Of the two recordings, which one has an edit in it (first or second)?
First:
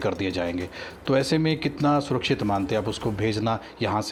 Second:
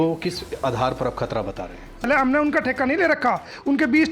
second